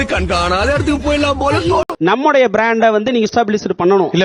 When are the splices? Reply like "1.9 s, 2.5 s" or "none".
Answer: 1.9 s, 3.3 s